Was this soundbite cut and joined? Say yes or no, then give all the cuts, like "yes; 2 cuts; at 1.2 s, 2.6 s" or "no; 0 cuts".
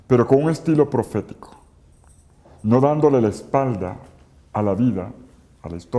no; 0 cuts